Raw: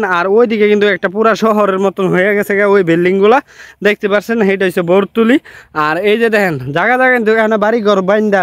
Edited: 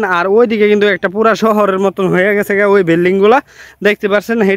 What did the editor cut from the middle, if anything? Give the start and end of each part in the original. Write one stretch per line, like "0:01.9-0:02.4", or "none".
none